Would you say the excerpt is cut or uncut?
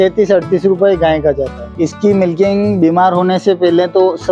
cut